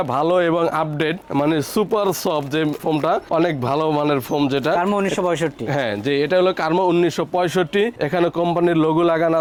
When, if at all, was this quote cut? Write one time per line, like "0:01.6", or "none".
none